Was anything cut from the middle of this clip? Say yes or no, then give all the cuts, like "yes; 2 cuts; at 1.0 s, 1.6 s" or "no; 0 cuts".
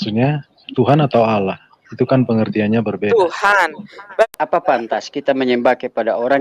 yes; 1 cut; at 4.2 s